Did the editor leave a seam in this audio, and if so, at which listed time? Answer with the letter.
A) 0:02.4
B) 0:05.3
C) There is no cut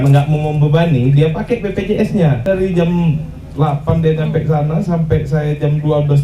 A